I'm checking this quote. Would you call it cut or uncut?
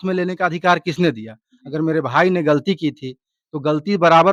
uncut